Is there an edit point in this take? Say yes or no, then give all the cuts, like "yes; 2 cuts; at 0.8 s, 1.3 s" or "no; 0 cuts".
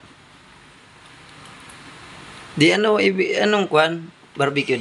no; 0 cuts